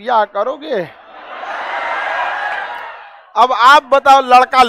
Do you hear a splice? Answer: no; 0 cuts

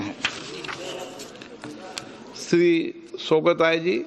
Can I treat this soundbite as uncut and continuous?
no; 1 cut; at 0.9 s

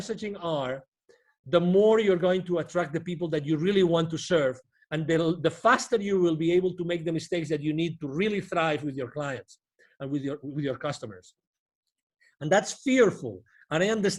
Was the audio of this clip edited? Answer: no; 0 cuts

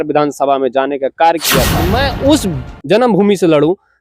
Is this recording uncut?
no; 1 cut; at 1.8 s

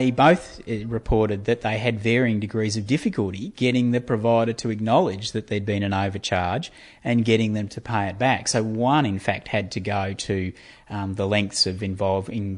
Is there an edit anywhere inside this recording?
no; 0 cuts

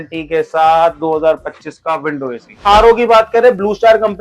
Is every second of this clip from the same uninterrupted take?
no; 1 cut; at 2.7 s

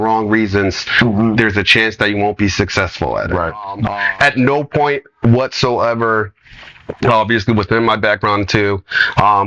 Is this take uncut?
no; 1 cut; at 3.9 s

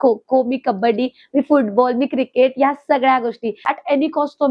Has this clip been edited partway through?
yes; 1 cut; at 3.6 s

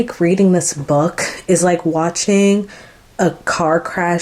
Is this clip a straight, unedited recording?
yes; 0 cuts

